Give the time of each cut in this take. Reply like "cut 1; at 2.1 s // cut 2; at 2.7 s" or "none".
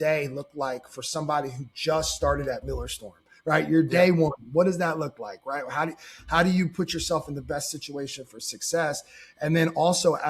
none